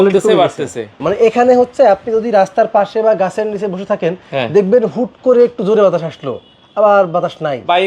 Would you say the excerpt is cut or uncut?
cut